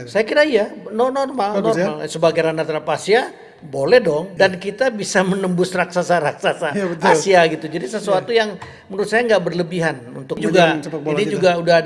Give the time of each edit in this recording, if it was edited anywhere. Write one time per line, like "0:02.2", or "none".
0:04.3
0:10.4